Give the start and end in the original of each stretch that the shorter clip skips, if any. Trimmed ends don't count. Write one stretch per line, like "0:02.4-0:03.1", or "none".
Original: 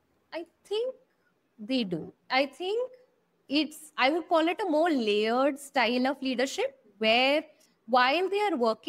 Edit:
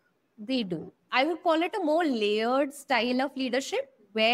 0:02.2-0:03.8